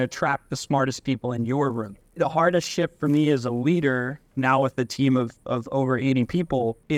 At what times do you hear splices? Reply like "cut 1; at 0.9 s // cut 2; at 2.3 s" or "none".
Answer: cut 1; at 2.2 s